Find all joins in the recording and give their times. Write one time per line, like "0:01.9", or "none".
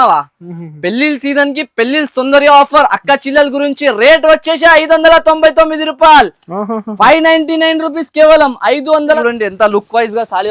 0:09.2